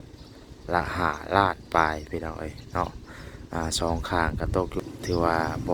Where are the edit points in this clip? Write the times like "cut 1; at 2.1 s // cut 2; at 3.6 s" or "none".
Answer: cut 1; at 4.8 s